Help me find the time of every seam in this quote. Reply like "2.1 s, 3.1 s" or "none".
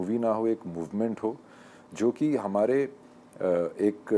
none